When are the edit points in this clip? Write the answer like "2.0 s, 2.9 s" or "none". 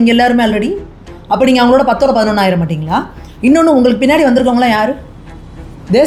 none